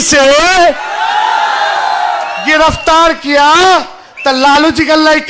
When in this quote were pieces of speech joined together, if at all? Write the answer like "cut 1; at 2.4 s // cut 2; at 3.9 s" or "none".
none